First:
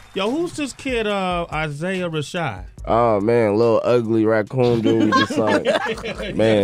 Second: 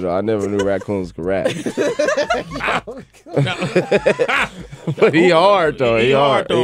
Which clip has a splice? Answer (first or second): first